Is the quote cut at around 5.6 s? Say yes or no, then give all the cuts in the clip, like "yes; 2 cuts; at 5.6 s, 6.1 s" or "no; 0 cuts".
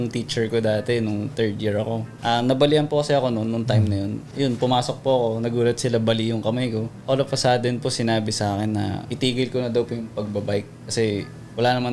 no; 4 cuts; at 2.1 s, 4.2 s, 7.0 s, 9.1 s